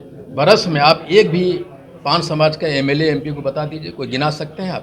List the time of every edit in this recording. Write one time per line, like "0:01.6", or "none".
none